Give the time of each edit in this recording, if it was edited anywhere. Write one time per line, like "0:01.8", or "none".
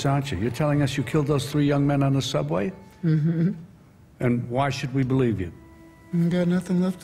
none